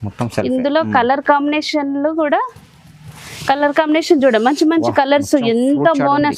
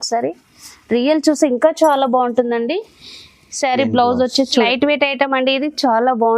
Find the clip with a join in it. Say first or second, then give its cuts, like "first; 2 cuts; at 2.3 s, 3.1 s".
second; 1 cut; at 4.7 s